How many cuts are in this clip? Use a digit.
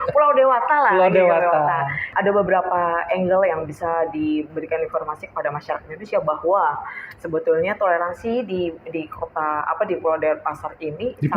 1